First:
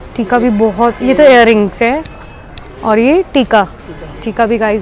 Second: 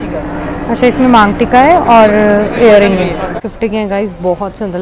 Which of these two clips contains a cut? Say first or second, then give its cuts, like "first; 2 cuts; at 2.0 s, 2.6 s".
second; 1 cut; at 3.4 s